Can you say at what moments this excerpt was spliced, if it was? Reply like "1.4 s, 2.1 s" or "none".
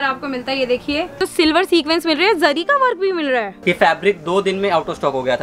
1.1 s, 3.5 s